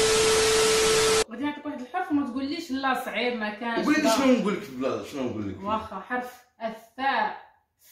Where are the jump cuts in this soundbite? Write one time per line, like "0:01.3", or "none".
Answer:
0:01.2